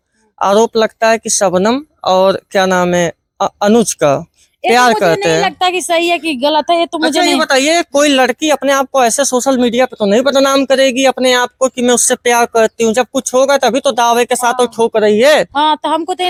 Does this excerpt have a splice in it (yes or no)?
no